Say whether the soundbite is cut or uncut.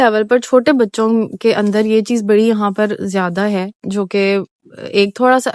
uncut